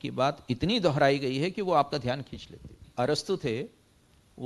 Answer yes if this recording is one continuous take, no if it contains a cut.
no